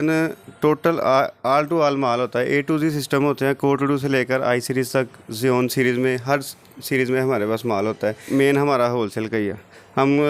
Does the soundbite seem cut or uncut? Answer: cut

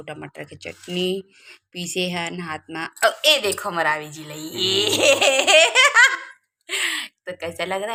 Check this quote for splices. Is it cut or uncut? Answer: uncut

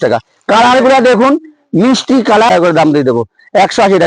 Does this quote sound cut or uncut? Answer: cut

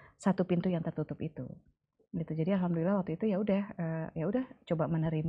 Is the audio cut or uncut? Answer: uncut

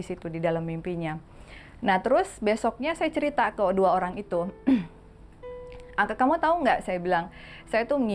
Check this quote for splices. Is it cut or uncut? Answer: uncut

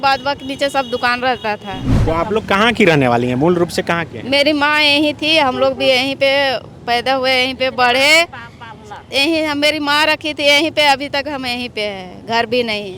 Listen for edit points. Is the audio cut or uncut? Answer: cut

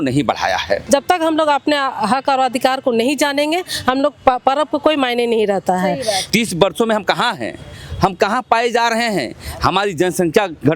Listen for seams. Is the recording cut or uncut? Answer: cut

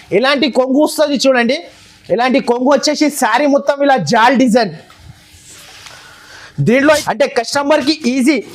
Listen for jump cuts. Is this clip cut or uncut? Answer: cut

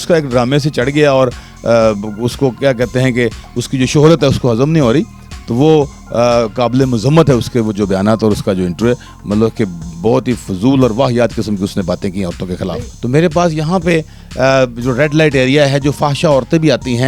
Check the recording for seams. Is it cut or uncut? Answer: cut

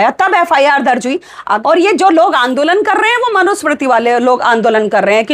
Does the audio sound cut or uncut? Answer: cut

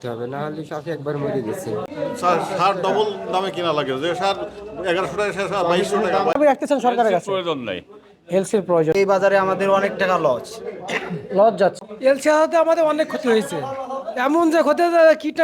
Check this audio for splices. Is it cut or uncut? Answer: cut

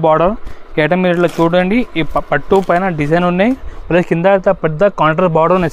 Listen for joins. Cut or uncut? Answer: uncut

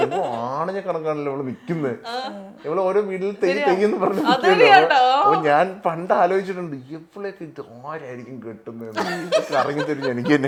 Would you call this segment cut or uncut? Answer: uncut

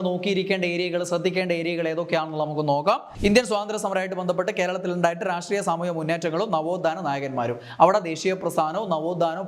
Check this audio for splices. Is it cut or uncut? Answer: cut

